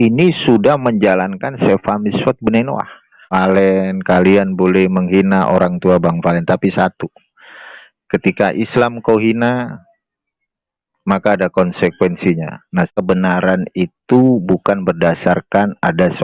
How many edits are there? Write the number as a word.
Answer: two